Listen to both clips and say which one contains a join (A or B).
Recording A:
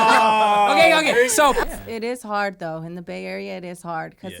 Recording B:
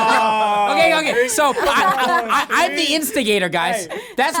A